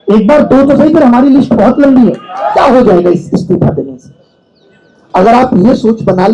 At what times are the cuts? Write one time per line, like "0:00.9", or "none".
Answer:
0:02.5